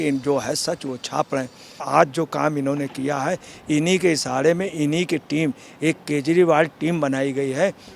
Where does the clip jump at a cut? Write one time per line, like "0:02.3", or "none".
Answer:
0:01.8